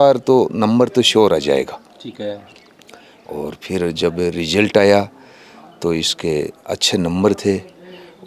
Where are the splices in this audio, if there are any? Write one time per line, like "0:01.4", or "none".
none